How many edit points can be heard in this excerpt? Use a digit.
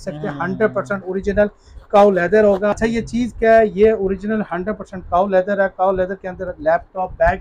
1